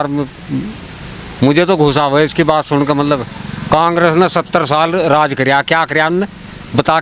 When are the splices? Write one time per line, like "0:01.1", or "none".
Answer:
none